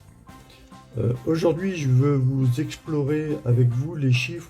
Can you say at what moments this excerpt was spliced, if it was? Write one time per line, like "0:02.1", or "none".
0:00.9